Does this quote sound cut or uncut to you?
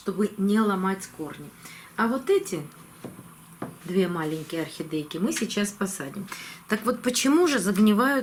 uncut